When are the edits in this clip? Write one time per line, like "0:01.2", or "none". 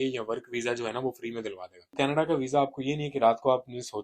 0:01.9